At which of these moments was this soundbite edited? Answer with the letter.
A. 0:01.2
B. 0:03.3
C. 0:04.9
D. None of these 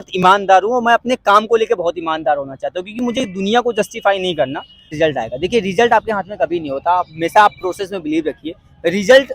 C